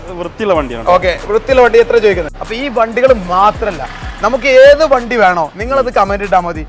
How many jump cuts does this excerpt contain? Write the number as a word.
one